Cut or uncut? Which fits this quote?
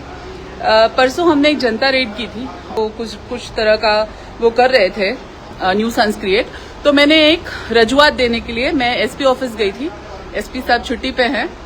cut